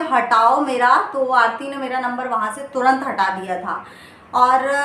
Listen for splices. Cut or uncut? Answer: uncut